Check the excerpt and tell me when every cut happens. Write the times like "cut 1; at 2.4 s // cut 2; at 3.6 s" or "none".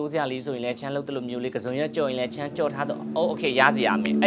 none